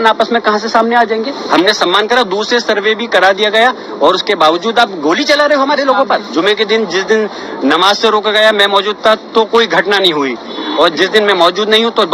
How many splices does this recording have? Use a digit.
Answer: 2